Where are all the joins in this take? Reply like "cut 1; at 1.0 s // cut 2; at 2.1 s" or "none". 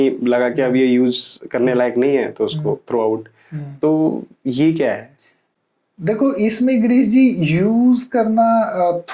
none